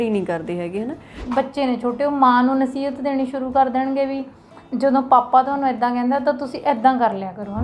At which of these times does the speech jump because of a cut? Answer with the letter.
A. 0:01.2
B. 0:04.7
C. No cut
A